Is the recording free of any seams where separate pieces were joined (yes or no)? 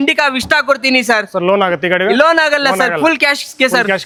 yes